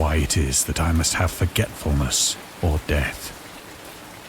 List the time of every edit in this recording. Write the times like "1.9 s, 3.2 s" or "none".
3.1 s